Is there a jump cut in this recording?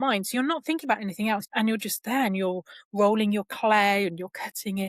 yes; 1 cut; at 1.5 s

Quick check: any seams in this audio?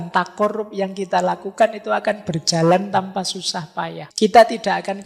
yes; 1 cut; at 4.0 s

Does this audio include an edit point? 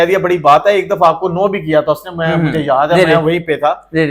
no; 0 cuts

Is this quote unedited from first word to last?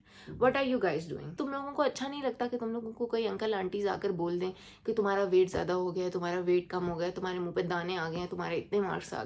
no; 1 cut; at 1.4 s

